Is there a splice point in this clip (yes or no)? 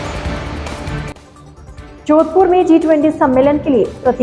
no